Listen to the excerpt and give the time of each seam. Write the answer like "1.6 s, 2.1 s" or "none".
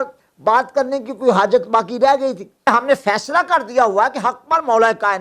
2.7 s

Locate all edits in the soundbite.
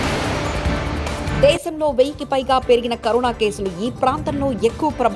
1.3 s

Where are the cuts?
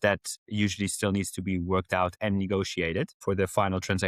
3.2 s

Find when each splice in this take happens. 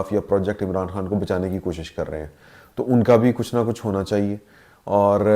none

